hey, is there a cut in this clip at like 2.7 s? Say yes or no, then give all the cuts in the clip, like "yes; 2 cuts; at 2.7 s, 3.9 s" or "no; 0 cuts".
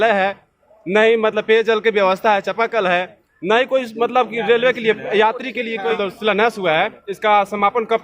no; 1 cut; at 6.0 s